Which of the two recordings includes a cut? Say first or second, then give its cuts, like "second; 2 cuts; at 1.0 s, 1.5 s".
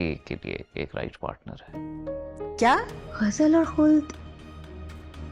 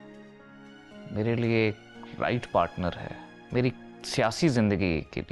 first; 1 cut; at 3.0 s